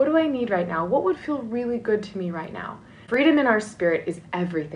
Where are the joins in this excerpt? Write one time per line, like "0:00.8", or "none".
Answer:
0:03.0